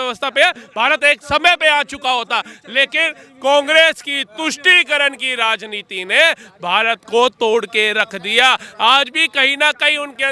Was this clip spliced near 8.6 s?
no; 0 cuts

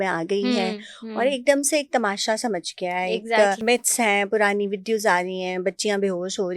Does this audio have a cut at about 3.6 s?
yes; 1 cut; at 3.6 s

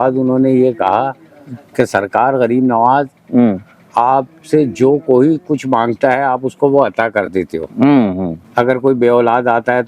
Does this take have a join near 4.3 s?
no; 1 cut; at 8.4 s

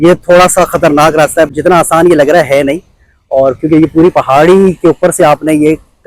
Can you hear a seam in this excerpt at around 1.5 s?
yes; 1 cut; at 1.5 s

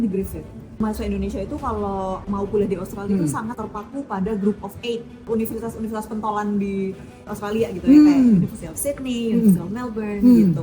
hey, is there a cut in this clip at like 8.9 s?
no; 5 cuts; at 0.8 s, 2.2 s, 3.6 s, 5.2 s, 7.3 s

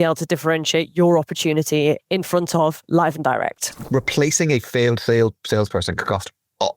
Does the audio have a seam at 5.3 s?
no; 1 cut; at 3.8 s

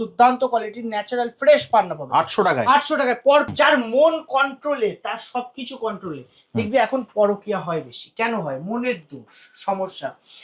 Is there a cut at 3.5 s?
yes; 1 cut; at 3.5 s

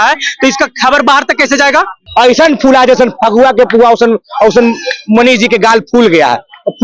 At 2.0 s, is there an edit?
yes; 1 cut; at 2.0 s

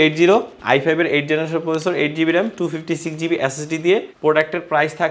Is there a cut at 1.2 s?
no; 1 cut; at 4.1 s

